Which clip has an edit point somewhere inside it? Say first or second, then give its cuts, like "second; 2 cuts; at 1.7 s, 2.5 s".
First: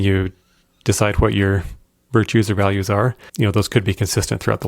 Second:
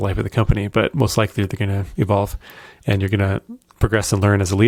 first; 1 cut; at 3.2 s